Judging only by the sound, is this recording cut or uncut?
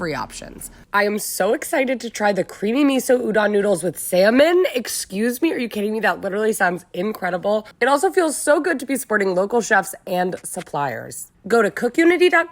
cut